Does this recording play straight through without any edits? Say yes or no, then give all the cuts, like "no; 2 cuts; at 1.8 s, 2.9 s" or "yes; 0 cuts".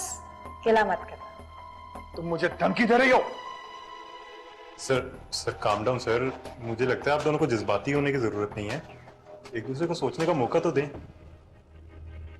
yes; 0 cuts